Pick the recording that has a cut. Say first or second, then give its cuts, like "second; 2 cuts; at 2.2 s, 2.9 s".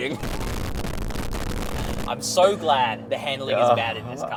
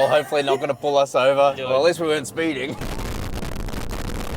second; 1 cut; at 1.6 s